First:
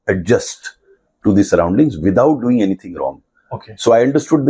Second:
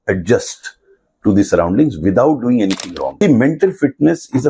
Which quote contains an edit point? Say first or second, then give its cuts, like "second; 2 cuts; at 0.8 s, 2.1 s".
second; 1 cut; at 3.1 s